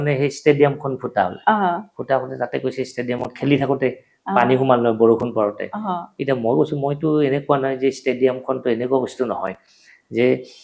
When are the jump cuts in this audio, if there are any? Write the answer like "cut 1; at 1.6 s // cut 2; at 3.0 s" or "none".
none